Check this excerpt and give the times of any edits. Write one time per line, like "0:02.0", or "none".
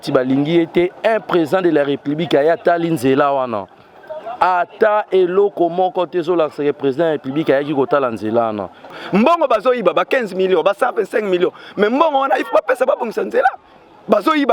0:08.9